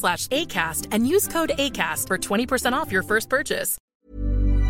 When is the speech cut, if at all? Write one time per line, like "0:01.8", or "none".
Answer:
0:03.7